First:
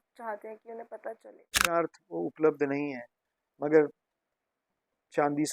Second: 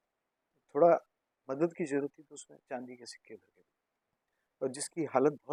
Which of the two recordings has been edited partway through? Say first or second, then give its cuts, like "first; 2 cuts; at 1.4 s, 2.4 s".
first; 1 cut; at 1.7 s